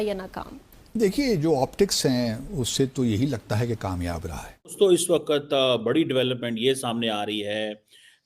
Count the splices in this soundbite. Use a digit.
1